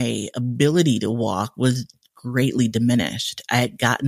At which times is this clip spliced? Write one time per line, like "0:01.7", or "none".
none